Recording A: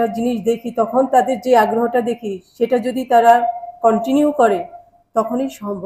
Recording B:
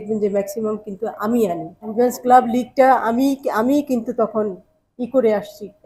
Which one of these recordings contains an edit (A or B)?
B